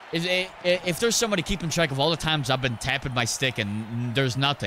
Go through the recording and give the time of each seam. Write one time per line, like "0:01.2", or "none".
none

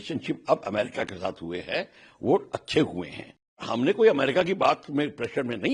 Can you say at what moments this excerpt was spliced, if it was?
0:03.6

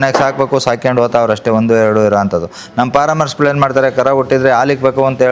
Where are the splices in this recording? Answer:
none

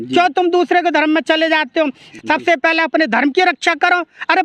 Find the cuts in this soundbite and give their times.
0:02.1

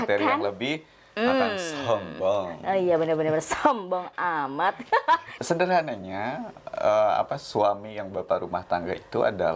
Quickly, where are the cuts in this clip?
0:05.3

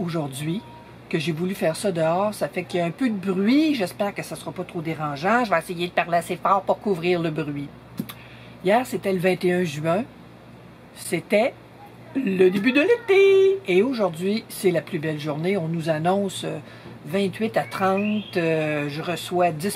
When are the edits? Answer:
none

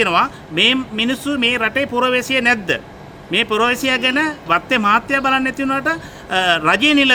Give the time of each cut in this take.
none

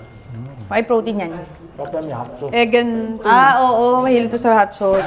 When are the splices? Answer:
none

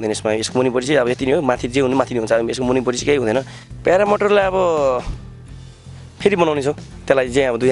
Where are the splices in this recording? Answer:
0:03.6

